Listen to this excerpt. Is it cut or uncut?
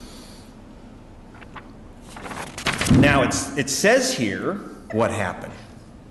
uncut